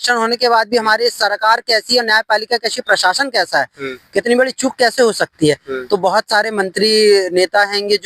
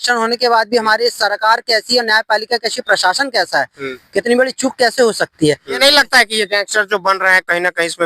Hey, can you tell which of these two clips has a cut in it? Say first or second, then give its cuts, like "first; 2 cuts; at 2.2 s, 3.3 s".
second; 1 cut; at 5.8 s